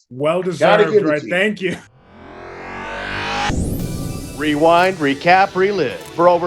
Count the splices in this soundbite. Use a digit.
1